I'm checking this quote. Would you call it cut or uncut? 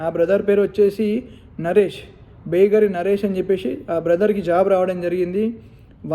uncut